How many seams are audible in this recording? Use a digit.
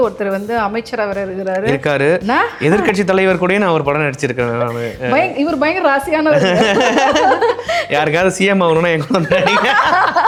0